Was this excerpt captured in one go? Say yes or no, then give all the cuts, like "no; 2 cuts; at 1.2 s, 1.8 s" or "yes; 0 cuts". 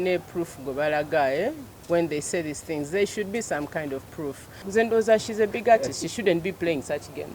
no; 1 cut; at 4.6 s